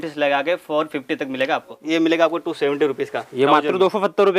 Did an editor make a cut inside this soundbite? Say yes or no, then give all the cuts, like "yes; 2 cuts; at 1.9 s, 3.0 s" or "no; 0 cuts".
yes; 1 cut; at 1.8 s